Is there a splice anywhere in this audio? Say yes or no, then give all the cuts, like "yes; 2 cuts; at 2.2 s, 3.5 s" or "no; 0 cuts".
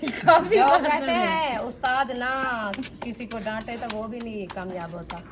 no; 0 cuts